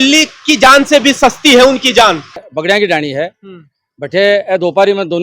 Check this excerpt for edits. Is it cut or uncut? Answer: cut